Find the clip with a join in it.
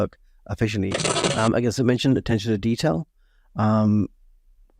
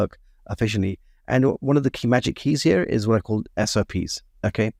first; 1 cut; at 1.1 s

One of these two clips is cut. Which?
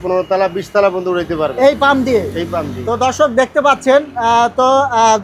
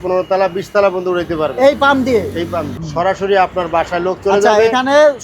second; 1 cut; at 2.7 s

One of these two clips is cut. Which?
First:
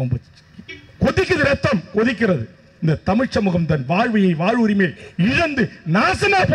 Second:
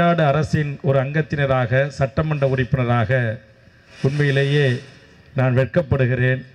first; 1 cut; at 2.7 s

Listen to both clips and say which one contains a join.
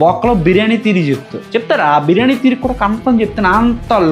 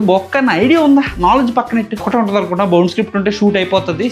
second; 1 cut; at 2.0 s

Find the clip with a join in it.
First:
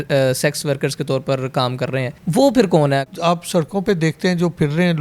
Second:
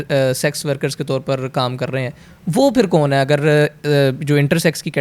first; 2 cuts; at 2.1 s, 3.0 s

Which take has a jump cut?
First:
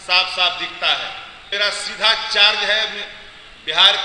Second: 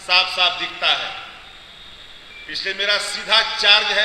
first; 1 cut; at 1.5 s

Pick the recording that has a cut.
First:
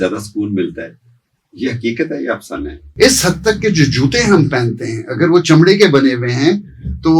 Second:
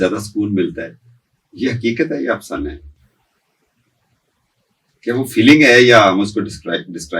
first; 1 cut; at 2.8 s

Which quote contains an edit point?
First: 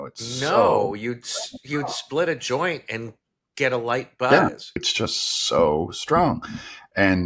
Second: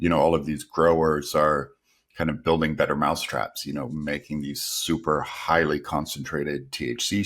first; 1 cut; at 4.9 s

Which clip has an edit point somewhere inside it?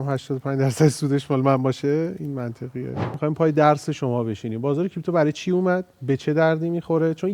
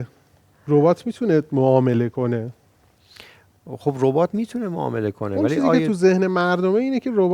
first; 1 cut; at 3.1 s

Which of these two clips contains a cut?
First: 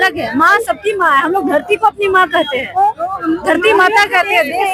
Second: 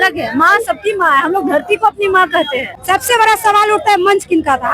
second; 1 cut; at 2.7 s

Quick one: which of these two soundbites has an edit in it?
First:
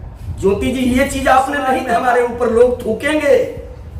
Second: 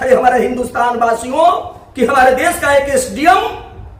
first; 1 cut; at 1.8 s

